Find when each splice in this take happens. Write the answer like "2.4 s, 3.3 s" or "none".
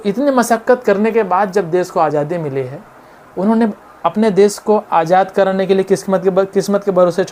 none